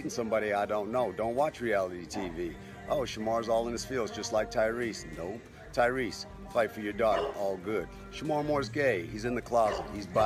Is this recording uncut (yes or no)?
yes